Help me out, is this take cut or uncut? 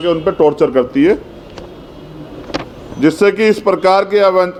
uncut